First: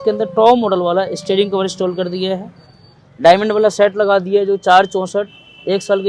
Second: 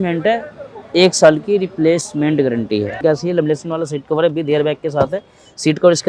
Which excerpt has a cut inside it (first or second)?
second